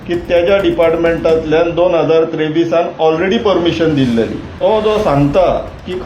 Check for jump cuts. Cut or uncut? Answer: cut